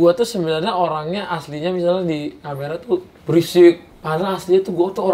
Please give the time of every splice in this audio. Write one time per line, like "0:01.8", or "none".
0:03.1
0:03.9